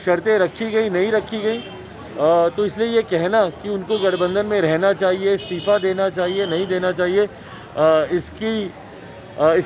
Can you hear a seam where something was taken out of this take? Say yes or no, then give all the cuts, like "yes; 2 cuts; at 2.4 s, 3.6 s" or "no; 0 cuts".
no; 0 cuts